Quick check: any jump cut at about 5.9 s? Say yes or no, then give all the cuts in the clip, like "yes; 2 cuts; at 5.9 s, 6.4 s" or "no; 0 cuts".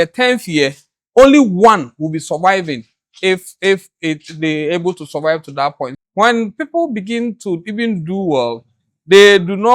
yes; 1 cut; at 5.9 s